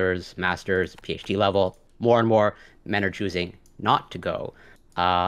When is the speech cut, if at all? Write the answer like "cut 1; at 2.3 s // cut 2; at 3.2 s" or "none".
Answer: cut 1; at 1.9 s